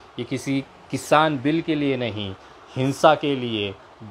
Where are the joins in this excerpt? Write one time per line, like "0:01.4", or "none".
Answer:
none